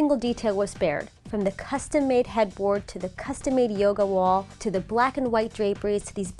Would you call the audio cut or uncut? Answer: uncut